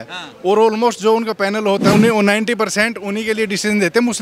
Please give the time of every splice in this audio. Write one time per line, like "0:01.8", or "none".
0:01.9